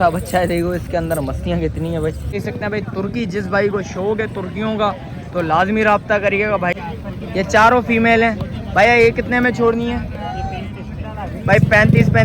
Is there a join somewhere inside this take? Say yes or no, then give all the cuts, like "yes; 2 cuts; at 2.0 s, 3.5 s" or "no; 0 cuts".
yes; 2 cuts; at 2.4 s, 6.8 s